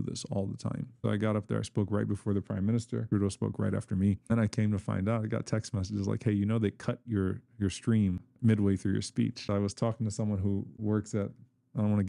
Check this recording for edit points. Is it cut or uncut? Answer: cut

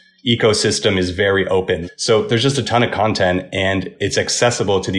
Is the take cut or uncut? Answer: cut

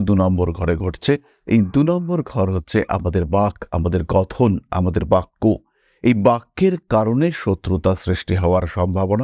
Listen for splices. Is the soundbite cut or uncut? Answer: uncut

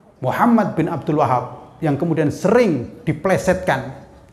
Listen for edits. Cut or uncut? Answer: uncut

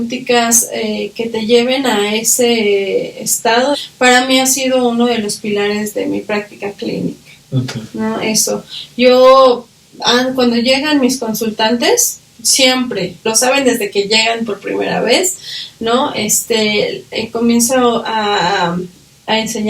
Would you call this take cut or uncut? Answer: cut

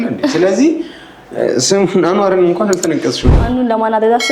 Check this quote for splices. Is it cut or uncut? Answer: cut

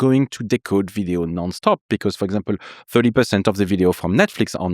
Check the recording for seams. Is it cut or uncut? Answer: uncut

